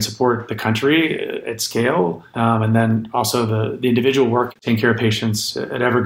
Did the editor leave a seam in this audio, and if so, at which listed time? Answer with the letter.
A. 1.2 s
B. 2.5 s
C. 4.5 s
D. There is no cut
C